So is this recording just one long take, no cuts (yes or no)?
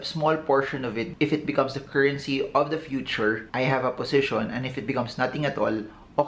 yes